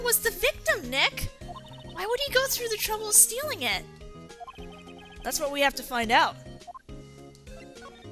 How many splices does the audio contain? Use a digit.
1